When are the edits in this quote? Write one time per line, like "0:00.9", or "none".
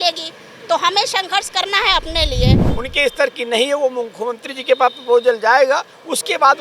0:02.7